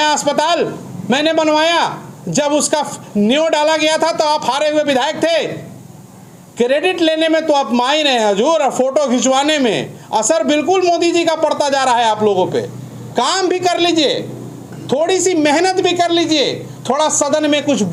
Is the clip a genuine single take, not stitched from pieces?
yes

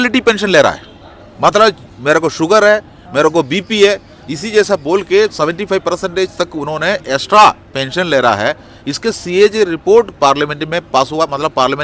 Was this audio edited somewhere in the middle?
no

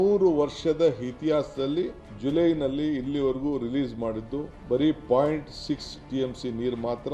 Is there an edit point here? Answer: yes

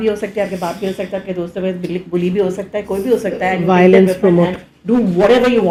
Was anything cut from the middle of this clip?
no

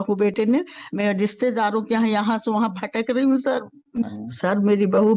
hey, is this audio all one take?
no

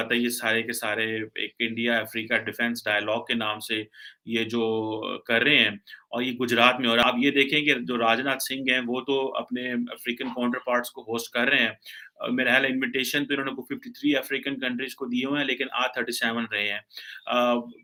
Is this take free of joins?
yes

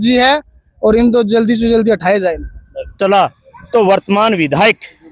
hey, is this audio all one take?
no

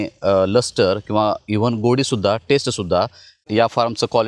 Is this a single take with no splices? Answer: no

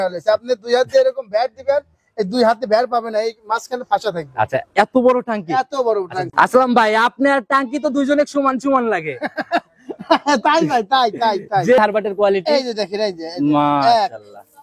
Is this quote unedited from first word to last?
no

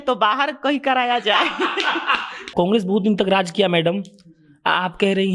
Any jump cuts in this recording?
yes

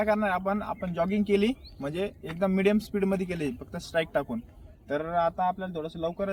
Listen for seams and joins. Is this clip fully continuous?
yes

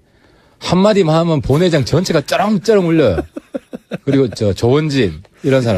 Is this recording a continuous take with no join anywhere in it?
no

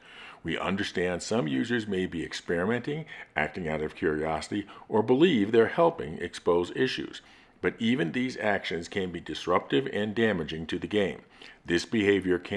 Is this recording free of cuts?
yes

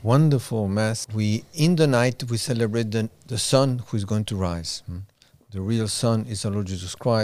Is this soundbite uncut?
no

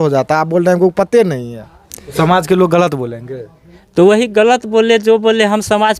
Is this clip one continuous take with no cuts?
no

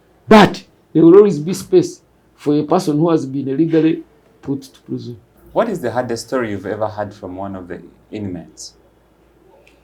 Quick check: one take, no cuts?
yes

